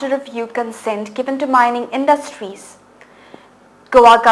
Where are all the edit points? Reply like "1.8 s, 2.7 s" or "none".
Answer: 1.9 s

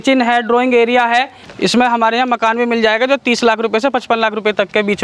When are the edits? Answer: 1.4 s

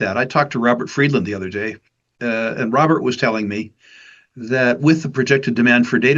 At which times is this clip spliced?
none

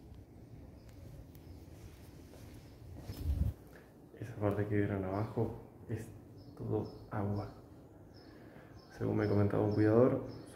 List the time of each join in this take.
3.1 s

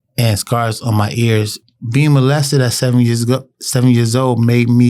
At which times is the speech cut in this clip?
1.6 s

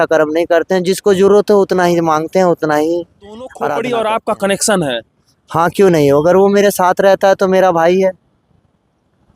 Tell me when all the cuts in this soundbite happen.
3.7 s

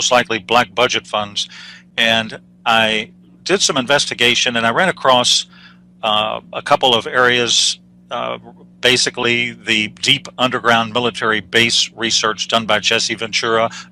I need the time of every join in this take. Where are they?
none

